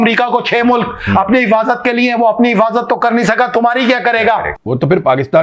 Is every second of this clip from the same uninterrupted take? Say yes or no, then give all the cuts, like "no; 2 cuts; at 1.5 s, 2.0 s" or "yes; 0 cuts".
no; 1 cut; at 4.5 s